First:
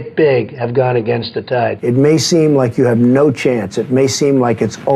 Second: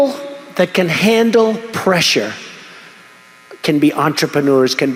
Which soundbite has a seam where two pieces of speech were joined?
first; 1 cut; at 1.8 s

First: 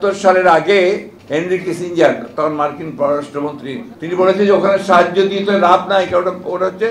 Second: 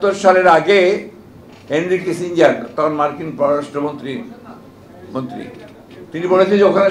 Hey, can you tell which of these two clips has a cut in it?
first; 2 cuts; at 1.1 s, 3.9 s

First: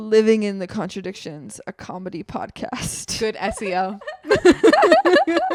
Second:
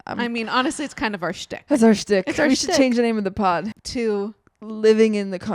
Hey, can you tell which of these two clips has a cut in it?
second; 1 cut; at 3.8 s

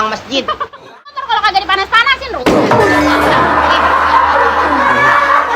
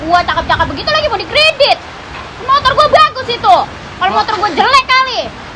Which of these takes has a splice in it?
first; 1 cut; at 1.2 s

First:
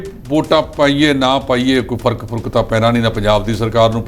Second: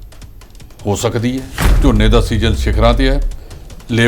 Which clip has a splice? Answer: second; 1 cut; at 1.6 s

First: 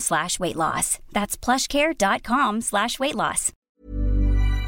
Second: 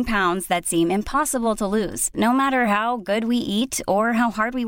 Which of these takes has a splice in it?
first; 1 cut; at 3.6 s

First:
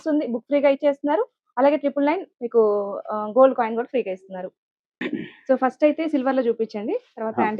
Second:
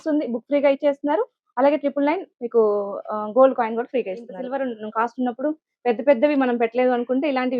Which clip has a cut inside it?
second; 1 cut; at 4.4 s

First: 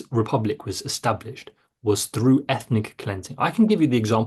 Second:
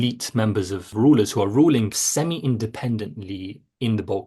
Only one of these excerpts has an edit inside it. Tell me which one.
second; 2 cuts; at 0.9 s, 2.0 s

